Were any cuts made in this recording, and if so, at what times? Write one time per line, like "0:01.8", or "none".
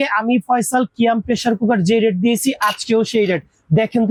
none